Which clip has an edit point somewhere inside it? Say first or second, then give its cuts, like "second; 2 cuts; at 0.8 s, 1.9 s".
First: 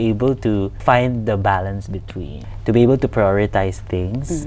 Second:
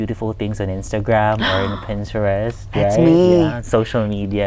first; 2 cuts; at 0.8 s, 2.3 s